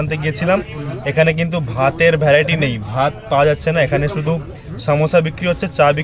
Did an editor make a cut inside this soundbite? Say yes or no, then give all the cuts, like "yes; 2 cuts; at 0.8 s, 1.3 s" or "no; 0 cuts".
no; 0 cuts